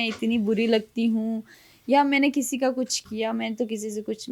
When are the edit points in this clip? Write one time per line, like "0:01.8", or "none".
none